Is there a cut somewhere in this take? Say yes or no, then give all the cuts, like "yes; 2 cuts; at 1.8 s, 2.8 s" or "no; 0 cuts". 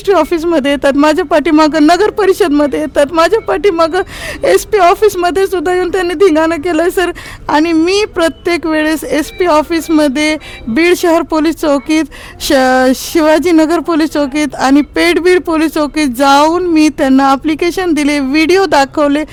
no; 0 cuts